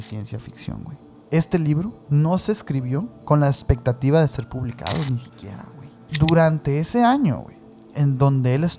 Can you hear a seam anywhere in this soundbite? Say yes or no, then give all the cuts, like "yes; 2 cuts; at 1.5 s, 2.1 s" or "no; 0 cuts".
yes; 2 cuts; at 1.1 s, 6.0 s